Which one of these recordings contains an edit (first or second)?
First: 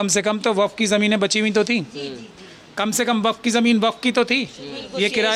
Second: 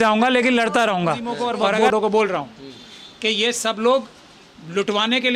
second